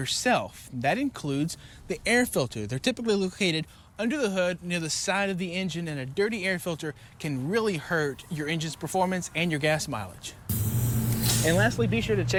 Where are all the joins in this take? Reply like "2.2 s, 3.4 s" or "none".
none